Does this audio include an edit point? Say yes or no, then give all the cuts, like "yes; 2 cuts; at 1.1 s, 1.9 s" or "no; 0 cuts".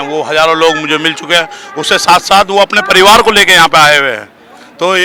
no; 0 cuts